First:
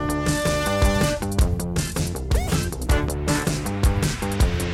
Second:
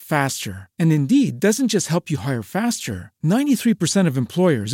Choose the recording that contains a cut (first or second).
first